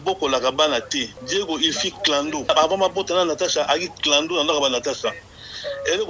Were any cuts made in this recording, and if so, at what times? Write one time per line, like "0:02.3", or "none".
0:01.2
0:02.5